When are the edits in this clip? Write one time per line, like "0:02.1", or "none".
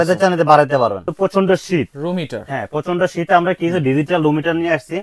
0:01.1